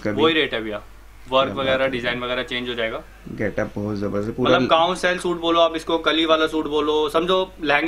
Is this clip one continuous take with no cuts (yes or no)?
yes